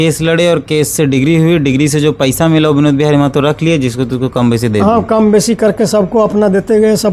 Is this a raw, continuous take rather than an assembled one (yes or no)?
yes